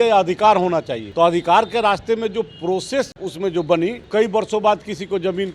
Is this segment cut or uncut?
cut